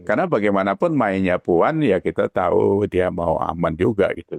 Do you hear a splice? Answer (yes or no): no